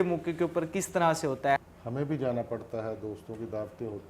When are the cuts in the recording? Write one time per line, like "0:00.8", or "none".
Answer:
0:01.6